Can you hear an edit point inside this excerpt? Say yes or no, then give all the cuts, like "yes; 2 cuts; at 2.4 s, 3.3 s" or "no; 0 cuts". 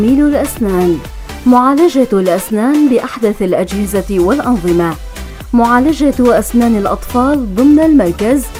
no; 0 cuts